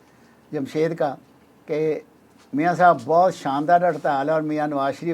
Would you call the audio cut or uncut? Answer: uncut